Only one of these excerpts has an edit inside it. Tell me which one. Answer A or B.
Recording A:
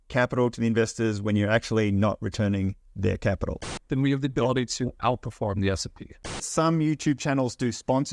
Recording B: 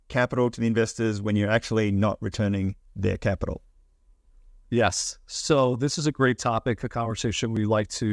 A